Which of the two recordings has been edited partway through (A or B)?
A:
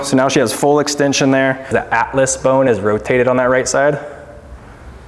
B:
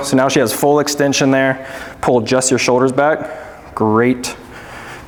A